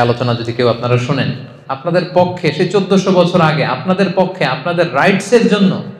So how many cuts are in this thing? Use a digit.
1